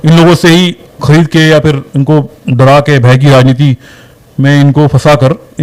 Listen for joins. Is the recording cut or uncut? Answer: uncut